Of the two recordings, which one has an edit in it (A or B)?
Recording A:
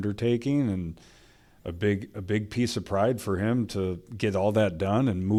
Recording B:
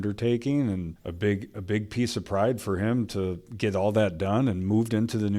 B